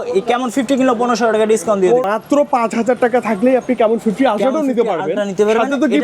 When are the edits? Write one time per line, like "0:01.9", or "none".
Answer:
0:02.0